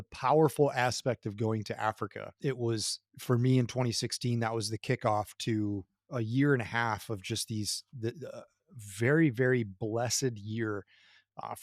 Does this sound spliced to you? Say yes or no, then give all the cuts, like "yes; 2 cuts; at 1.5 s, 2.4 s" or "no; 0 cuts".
yes; 1 cut; at 2.3 s